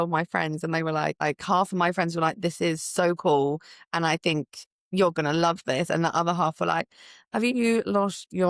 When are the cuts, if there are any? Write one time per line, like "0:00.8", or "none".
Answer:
0:01.2

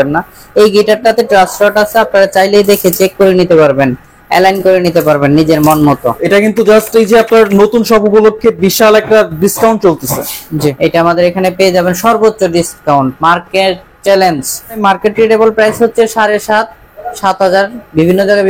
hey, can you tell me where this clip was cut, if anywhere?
0:06.2
0:10.8
0:14.8

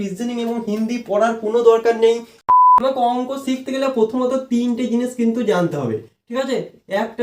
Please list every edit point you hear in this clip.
0:02.5

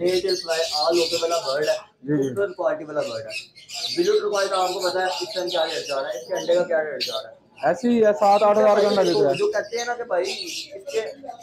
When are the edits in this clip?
none

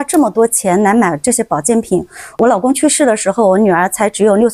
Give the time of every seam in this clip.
none

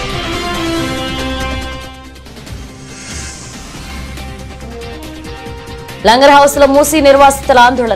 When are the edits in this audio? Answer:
none

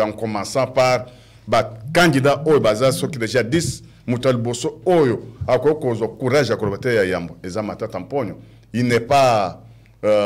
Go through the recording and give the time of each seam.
none

